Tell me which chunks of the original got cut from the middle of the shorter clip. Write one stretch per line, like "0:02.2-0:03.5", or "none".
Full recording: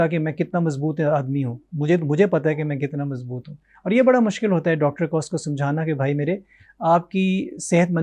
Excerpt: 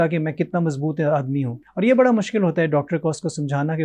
0:01.6-0:03.7